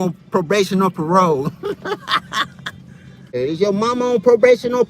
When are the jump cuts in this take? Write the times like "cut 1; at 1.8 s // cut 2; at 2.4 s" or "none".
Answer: cut 1; at 3.4 s